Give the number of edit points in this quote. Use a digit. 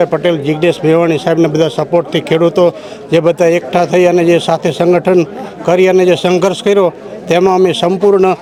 0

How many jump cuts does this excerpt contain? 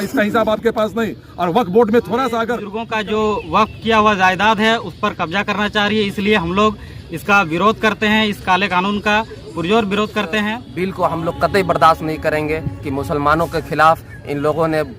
2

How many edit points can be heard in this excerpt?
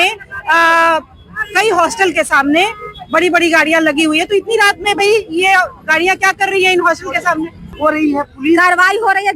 1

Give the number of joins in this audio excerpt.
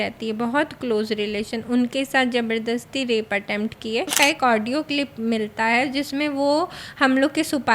1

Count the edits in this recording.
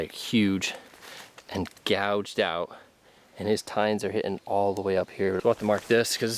1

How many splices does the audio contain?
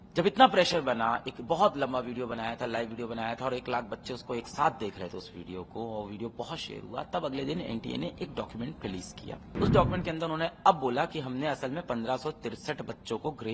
1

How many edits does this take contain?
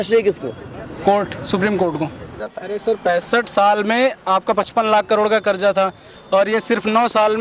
1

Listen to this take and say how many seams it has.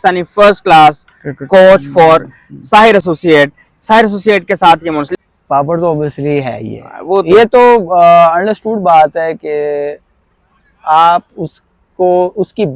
1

